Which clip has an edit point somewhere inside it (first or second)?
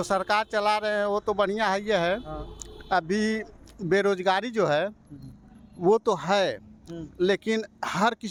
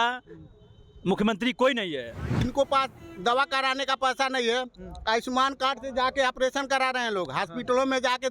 second